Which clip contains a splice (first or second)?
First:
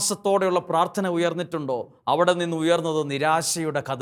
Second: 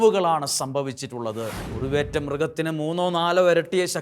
second